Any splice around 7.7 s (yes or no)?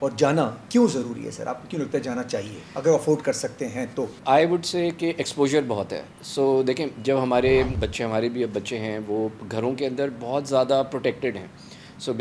yes